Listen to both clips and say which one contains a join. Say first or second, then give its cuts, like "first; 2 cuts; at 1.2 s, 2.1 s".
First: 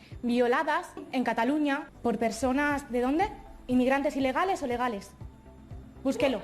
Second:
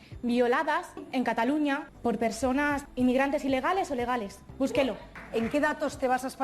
second; 3 cuts; at 2.8 s, 4.4 s, 5.1 s